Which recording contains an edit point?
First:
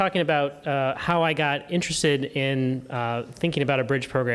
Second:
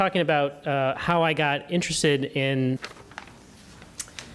first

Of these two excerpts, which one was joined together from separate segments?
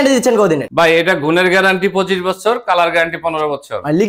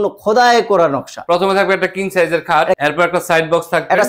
second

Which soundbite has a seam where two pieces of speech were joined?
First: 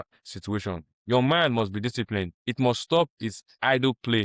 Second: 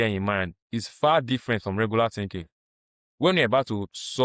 first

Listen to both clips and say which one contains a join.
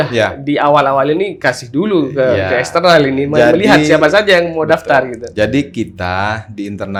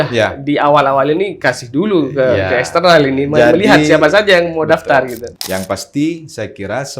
second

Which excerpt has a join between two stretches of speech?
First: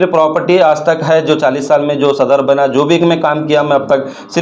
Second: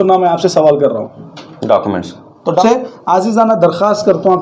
second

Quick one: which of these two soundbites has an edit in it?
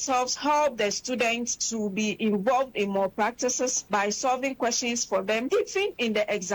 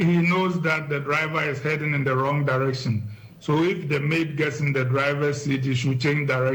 first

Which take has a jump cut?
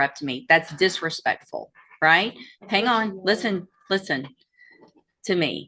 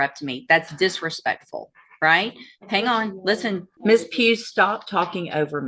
second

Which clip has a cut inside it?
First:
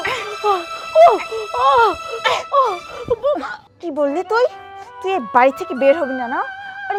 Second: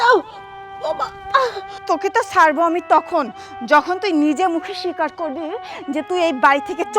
second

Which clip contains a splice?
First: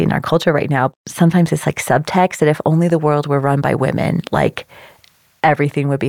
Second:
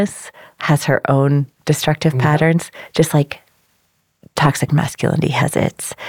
first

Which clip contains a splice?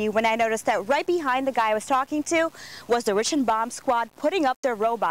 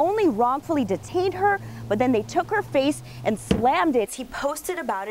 second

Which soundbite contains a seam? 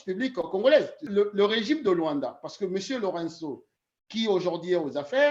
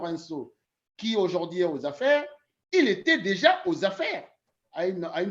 first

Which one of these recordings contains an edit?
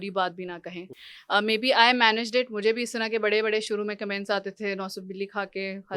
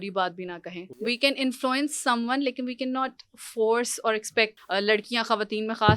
second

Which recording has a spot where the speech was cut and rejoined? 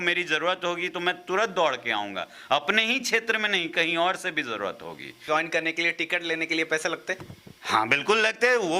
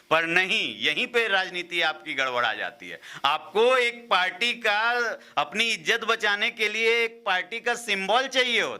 first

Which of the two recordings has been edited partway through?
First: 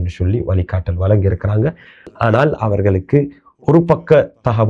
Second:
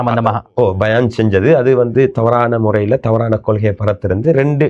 first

